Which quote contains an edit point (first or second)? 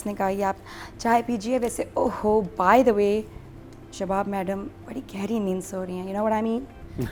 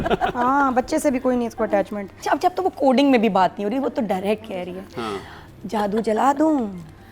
second